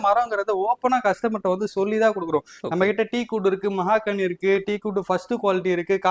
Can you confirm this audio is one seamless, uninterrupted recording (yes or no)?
yes